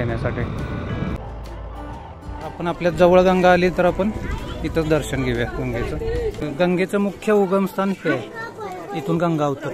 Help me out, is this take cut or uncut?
cut